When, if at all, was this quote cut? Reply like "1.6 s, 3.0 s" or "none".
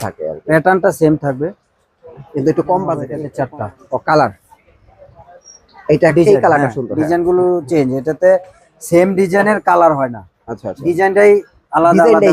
3.2 s